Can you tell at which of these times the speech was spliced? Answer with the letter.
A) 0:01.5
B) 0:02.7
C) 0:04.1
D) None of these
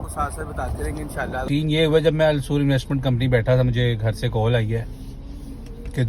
A